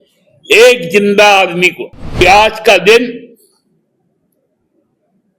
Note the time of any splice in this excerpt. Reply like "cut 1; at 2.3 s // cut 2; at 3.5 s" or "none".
cut 1; at 2.2 s